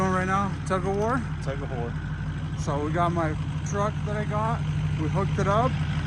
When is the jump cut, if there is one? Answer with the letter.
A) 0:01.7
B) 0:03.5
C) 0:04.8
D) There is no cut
D